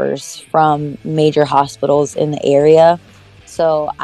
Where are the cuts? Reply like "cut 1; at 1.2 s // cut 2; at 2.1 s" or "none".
none